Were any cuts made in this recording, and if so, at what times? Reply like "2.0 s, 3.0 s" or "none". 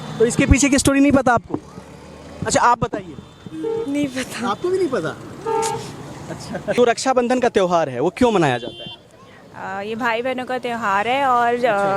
6.8 s

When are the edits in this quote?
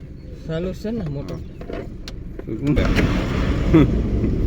2.8 s

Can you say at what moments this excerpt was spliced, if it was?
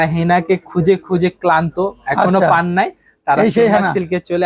none

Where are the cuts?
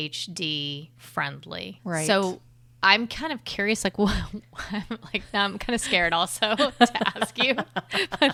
none

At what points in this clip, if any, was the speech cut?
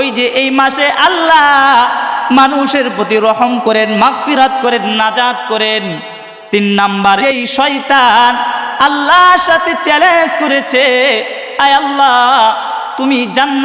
7.2 s

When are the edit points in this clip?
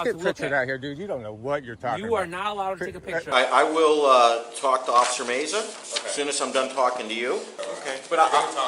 3.3 s, 7.6 s

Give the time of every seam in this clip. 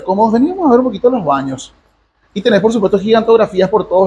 none

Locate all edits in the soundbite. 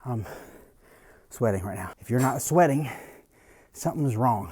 1.9 s

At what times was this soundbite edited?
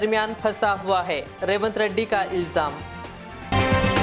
none

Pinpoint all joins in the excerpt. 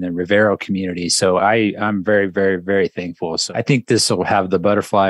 3.3 s

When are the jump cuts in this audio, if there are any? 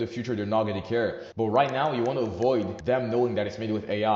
1.7 s

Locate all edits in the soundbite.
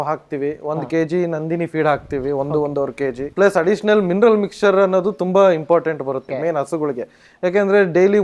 3.2 s, 6.3 s

